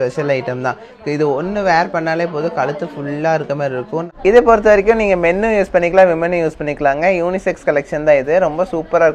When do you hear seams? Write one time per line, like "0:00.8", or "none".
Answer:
0:04.1